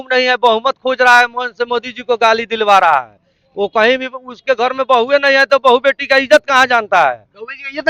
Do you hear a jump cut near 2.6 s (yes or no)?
no